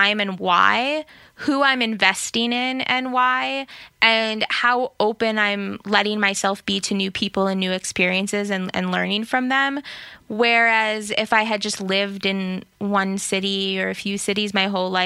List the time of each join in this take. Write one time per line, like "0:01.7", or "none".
none